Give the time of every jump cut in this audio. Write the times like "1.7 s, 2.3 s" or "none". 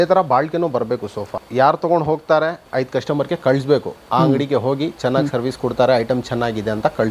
none